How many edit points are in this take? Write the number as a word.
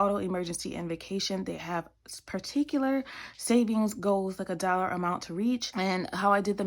one